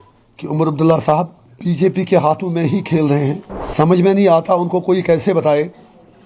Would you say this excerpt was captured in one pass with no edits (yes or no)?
no